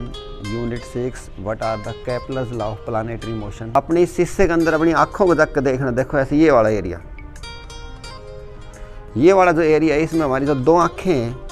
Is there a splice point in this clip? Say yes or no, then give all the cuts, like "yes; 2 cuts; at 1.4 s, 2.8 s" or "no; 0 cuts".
yes; 1 cut; at 3.8 s